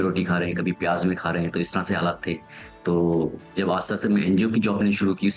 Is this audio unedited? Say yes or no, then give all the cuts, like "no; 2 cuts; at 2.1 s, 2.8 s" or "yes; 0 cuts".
yes; 0 cuts